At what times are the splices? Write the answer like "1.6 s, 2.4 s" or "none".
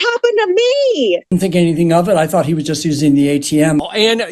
1.3 s

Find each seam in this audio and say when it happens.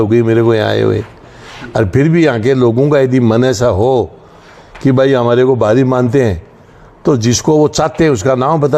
none

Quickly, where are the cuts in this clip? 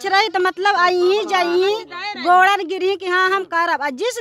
none

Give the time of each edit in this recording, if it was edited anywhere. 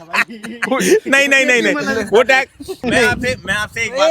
2.8 s

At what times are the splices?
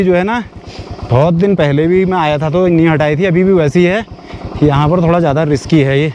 none

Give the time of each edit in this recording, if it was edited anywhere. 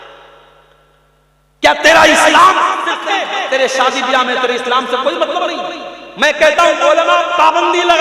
3.0 s

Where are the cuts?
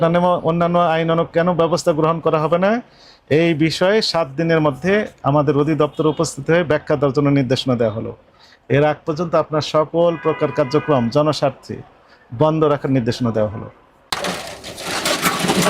14.0 s

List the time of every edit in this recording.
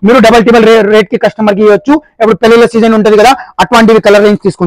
none

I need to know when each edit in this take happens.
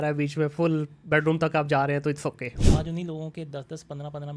2.6 s

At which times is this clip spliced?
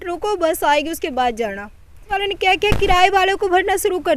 2.1 s

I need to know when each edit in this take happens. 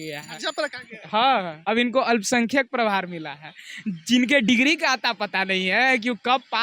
1.5 s

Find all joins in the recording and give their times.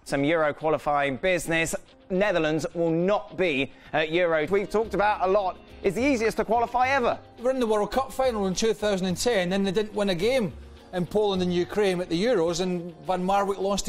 none

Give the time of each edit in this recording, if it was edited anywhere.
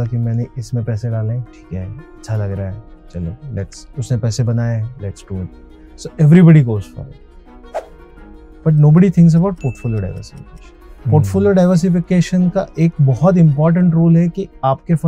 1.6 s

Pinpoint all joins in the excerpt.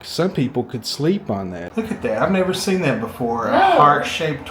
1.6 s

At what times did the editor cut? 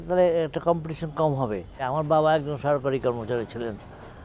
1.7 s

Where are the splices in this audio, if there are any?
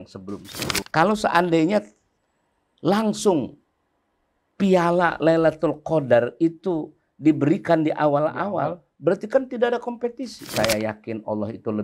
0.9 s, 10.4 s

